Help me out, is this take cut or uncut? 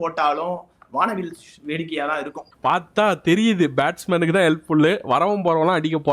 cut